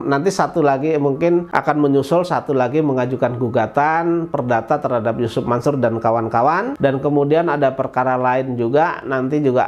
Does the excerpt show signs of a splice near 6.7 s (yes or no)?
yes